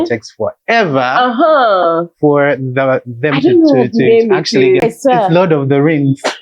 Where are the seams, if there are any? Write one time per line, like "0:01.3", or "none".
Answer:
0:04.8